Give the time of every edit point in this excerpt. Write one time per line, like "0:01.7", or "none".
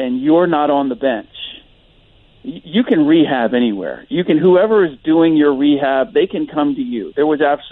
none